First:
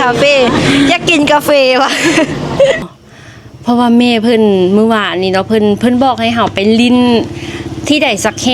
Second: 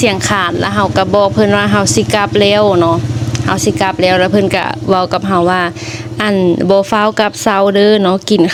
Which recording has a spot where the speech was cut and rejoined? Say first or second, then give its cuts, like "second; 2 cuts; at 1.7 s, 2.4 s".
first; 1 cut; at 2.9 s